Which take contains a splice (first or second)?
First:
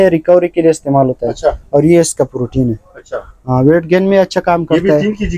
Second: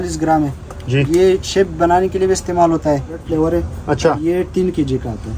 second